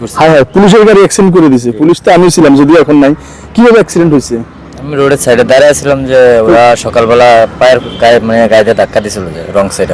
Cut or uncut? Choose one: uncut